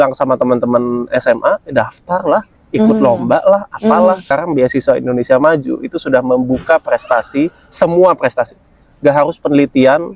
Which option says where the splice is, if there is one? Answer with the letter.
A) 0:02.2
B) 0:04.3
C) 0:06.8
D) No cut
B